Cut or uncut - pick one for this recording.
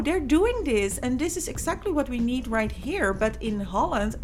uncut